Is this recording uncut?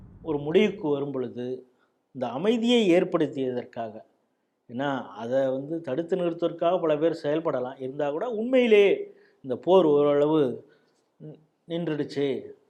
yes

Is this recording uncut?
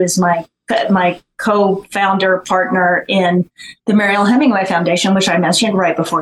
yes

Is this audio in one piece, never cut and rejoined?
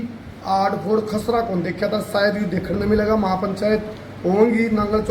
yes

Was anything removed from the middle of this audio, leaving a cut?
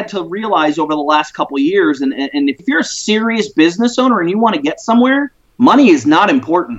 yes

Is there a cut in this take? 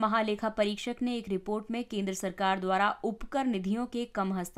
no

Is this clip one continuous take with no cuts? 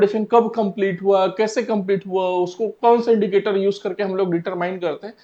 yes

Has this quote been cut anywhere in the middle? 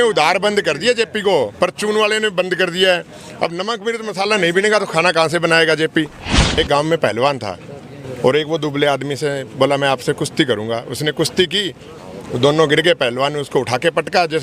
yes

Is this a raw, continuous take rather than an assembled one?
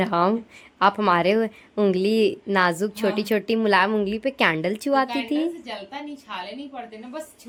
yes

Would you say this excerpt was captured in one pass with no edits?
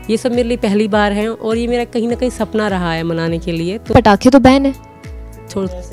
no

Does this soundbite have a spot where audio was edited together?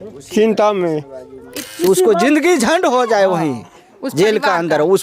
yes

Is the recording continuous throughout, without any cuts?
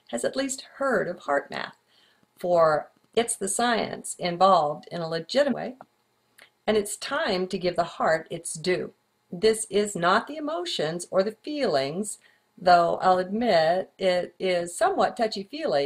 yes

